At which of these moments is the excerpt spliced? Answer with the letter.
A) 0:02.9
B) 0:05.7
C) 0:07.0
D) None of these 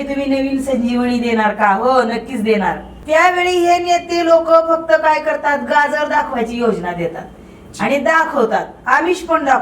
A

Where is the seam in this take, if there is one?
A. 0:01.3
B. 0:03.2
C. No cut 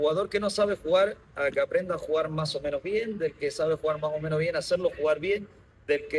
C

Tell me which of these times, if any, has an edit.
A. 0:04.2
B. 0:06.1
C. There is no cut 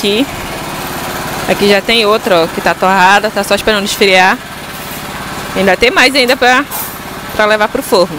C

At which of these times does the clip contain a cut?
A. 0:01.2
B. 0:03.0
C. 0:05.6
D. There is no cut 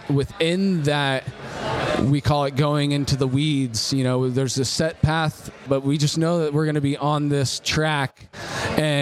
C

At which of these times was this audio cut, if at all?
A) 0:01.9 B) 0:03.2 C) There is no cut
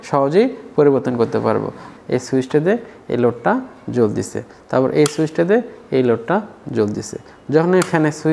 A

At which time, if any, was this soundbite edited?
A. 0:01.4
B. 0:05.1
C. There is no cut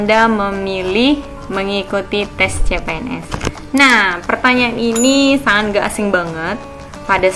A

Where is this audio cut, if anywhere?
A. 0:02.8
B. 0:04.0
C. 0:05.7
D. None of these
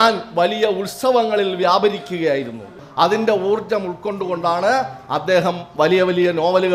A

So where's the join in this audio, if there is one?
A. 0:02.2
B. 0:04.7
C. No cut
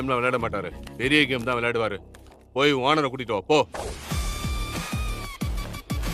C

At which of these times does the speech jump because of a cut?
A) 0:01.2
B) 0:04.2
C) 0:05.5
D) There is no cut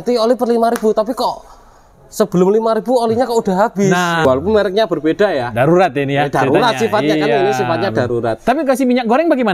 B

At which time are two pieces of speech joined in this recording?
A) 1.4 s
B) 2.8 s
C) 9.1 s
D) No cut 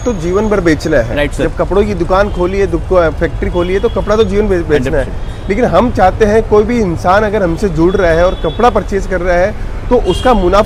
D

